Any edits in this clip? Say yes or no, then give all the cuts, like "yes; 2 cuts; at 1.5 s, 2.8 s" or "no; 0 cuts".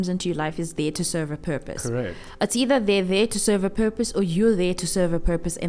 no; 0 cuts